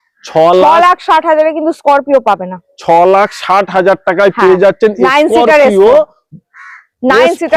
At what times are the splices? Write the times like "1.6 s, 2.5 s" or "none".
none